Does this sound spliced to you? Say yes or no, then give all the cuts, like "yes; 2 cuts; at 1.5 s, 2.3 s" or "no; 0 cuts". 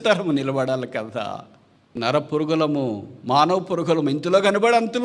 yes; 1 cut; at 2.0 s